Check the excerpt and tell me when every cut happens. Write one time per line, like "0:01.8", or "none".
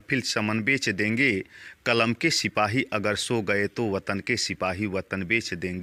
none